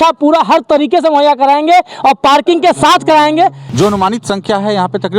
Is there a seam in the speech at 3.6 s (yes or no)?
yes